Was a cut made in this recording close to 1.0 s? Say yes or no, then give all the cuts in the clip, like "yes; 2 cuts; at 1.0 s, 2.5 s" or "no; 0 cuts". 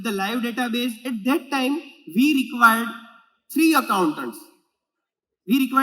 yes; 1 cut; at 1.0 s